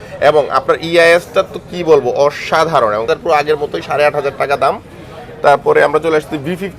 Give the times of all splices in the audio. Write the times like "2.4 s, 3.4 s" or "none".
3.1 s